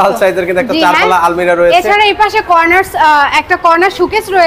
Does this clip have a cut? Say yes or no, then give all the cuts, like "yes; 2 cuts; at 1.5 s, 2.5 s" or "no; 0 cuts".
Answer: no; 0 cuts